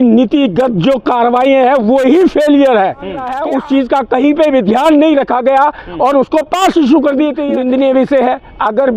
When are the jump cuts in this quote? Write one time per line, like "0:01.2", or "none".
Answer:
0:03.3
0:07.4